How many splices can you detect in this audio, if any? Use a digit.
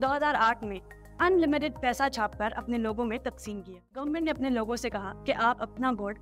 1